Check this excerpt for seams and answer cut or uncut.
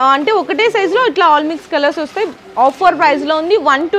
uncut